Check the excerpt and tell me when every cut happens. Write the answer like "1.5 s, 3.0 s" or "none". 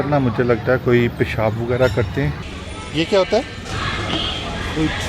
2.4 s